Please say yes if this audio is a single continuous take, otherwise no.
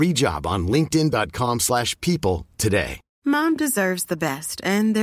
no